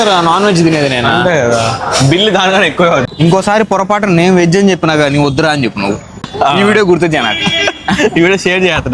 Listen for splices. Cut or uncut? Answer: cut